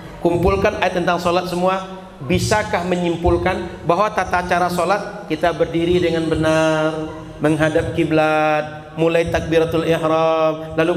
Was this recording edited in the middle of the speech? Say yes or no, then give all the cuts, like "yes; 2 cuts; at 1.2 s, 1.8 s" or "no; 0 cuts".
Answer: no; 0 cuts